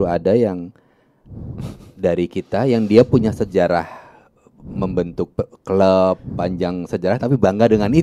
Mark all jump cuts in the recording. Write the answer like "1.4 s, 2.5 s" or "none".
none